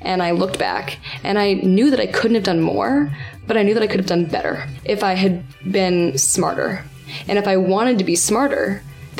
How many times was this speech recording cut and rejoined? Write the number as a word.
one